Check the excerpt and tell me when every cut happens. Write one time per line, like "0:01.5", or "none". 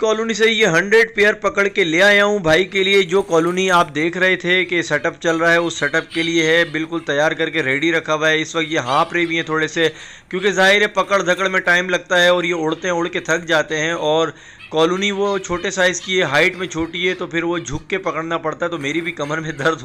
none